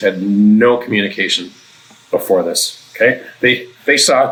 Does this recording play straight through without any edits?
yes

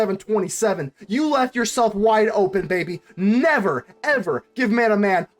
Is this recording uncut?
yes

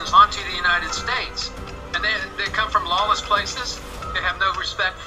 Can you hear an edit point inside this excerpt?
no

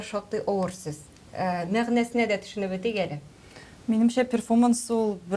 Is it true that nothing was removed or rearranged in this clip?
yes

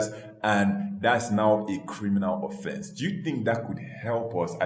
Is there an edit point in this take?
no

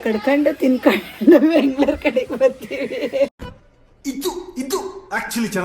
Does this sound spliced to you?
yes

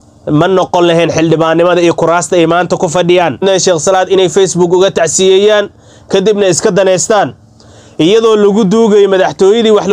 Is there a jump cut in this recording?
yes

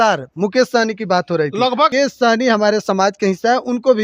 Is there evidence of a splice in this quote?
yes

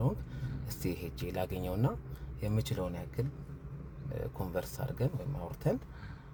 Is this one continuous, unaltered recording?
yes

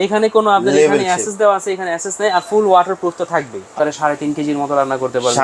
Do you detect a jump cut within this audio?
yes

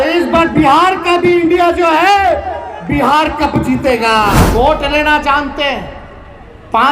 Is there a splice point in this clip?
yes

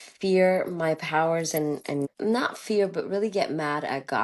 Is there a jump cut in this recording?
yes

